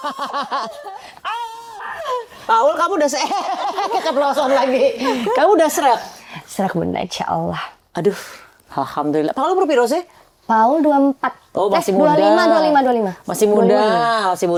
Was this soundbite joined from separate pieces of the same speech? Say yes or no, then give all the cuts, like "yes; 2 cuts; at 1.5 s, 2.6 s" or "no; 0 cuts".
no; 0 cuts